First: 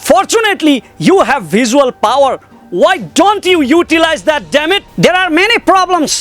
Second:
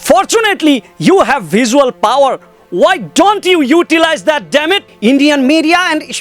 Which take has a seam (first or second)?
second